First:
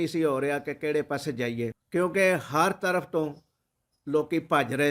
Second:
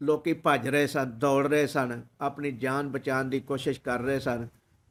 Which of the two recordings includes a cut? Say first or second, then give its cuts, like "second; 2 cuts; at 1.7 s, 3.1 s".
first; 1 cut; at 1.8 s